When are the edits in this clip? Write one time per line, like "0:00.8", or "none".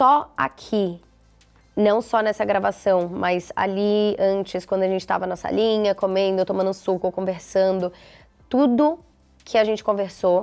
none